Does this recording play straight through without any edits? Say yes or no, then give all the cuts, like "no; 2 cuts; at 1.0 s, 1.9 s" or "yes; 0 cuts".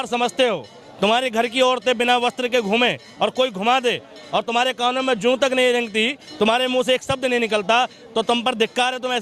yes; 0 cuts